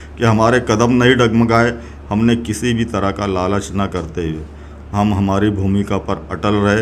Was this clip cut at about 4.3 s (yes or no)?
no